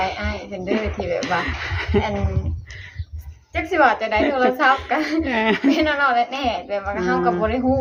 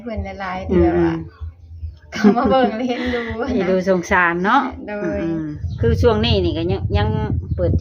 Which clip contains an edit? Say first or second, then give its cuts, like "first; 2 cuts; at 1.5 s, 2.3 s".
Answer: second; 1 cut; at 5.6 s